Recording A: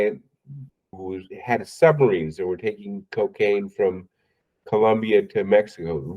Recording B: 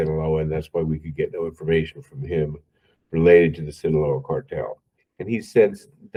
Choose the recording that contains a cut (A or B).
A